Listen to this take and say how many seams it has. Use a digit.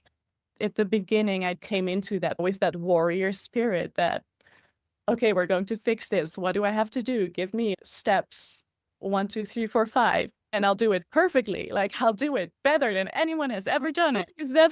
1